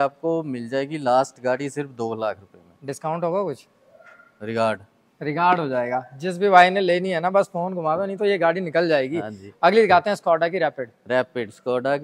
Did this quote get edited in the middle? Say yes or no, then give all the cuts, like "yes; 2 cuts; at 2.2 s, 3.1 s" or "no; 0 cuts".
no; 0 cuts